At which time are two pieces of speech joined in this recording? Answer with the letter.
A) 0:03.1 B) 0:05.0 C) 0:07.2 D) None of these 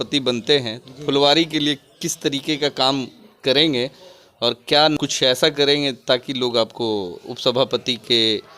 B